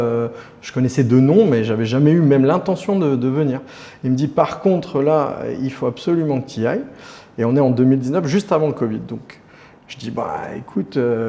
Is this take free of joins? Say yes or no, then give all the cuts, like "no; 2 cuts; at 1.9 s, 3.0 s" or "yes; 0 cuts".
yes; 0 cuts